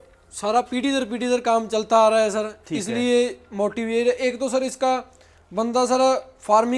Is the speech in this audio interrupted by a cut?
no; 0 cuts

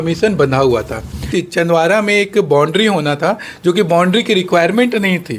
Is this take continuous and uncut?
no; 1 cut; at 1.3 s

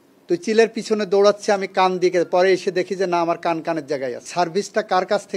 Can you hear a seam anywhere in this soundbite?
yes; 1 cut; at 4.2 s

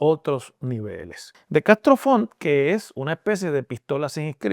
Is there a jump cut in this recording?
yes; 1 cut; at 1.2 s

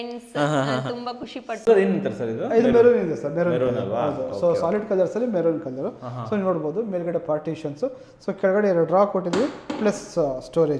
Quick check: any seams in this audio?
yes; 1 cut; at 1.7 s

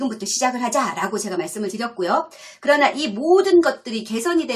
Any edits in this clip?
no; 0 cuts

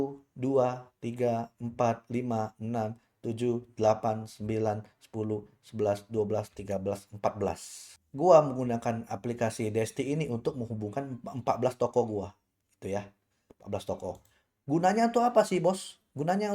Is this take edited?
no; 0 cuts

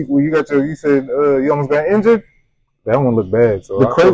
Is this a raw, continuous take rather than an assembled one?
yes; 0 cuts

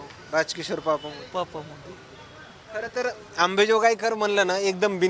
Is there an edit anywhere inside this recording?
no; 0 cuts

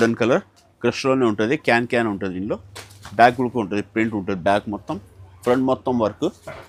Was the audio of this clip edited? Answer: no; 0 cuts

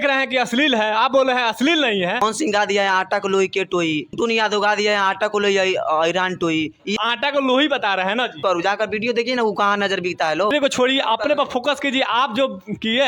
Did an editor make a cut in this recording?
yes; 5 cuts; at 2.2 s, 4.1 s, 6.9 s, 8.4 s, 10.5 s

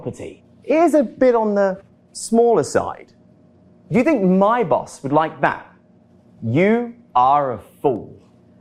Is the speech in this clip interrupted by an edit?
no; 0 cuts

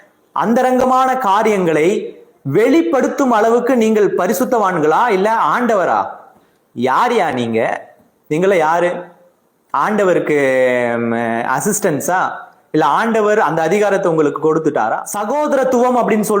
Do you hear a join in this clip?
yes; 1 cut; at 15.1 s

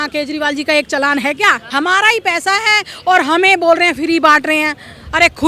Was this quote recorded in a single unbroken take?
no; 1 cut; at 1.6 s

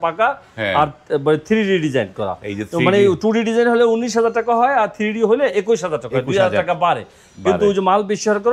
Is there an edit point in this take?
no; 0 cuts

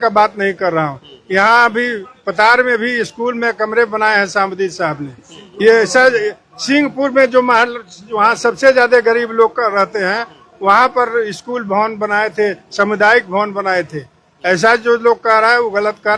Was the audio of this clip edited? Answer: no; 0 cuts

